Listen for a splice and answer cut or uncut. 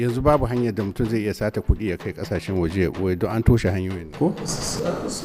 uncut